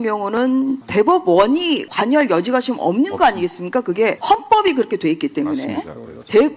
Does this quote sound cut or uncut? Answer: cut